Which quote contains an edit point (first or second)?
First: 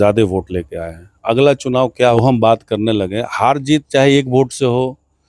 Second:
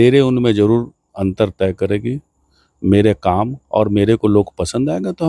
first